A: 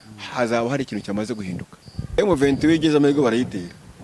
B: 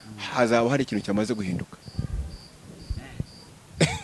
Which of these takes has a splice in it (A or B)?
A